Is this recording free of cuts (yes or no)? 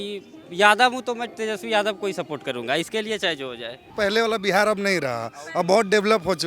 no